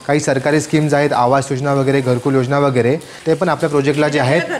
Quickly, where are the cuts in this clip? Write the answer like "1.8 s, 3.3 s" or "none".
3.1 s